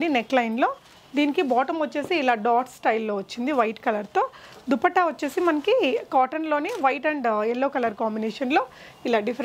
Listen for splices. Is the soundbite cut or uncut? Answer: uncut